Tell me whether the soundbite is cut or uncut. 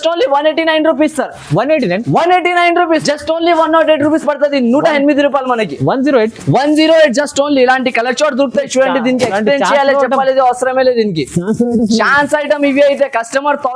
cut